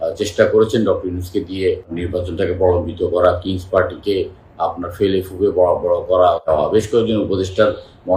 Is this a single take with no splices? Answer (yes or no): no